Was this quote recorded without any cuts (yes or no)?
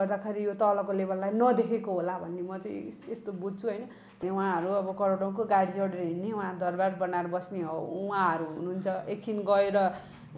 no